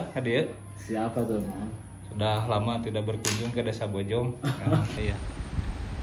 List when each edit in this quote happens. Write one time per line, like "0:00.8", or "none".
0:05.0

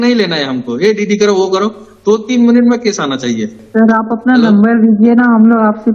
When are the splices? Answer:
0:03.5

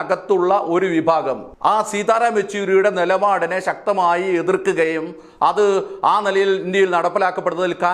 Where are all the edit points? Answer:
0:01.5

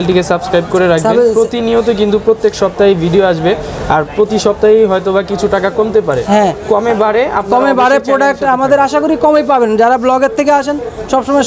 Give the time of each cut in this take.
none

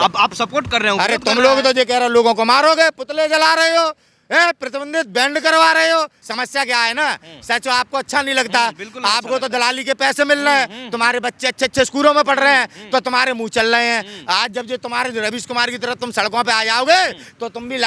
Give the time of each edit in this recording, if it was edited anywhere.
0:06.2

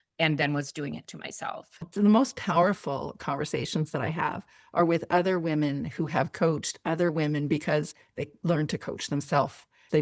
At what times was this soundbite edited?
none

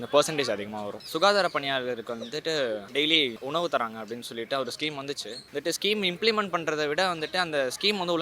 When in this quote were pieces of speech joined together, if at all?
0:01.0
0:03.0
0:05.4

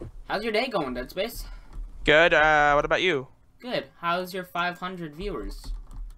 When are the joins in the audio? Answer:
none

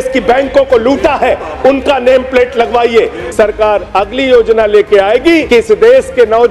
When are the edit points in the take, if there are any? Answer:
0:03.6
0:05.4

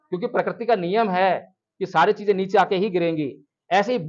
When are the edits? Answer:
none

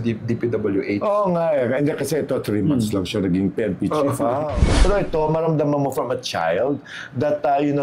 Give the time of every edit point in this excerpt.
0:04.6

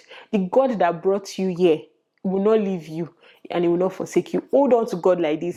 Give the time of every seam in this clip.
none

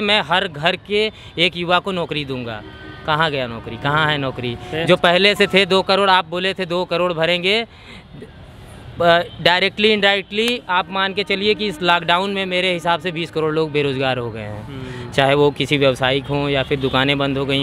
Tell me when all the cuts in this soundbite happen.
none

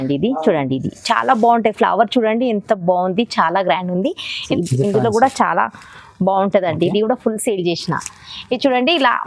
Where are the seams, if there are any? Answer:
0:04.4

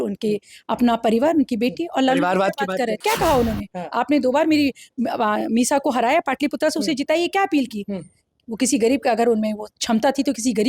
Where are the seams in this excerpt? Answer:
0:03.0

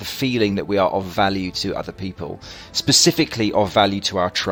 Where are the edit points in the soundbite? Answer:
none

